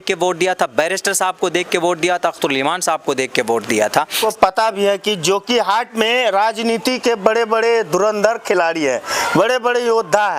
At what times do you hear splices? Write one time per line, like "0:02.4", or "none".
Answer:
0:04.1